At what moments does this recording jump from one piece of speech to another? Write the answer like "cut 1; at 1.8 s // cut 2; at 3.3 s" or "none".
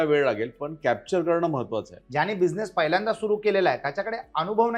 cut 1; at 2.0 s